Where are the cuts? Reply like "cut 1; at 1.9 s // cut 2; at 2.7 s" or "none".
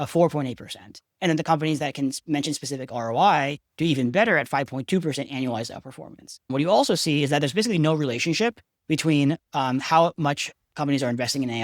cut 1; at 6.5 s